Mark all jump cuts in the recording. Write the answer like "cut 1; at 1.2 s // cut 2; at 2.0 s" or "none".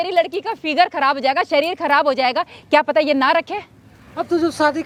none

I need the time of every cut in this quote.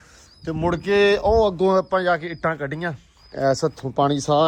none

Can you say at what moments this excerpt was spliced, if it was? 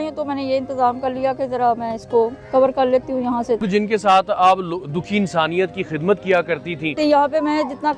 cut 1; at 3.7 s // cut 2; at 6.9 s

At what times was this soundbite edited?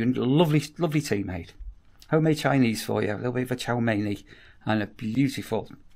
none

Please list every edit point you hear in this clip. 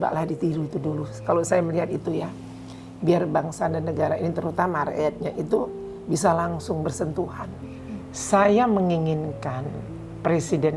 cut 1; at 7.6 s

